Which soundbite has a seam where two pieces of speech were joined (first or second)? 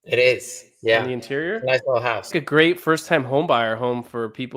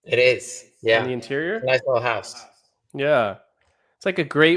first